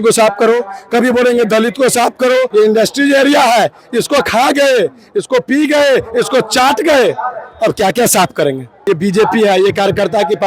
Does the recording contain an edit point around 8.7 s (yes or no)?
yes